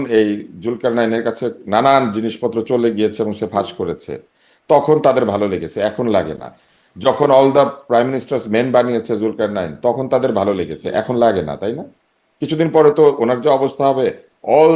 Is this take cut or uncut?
uncut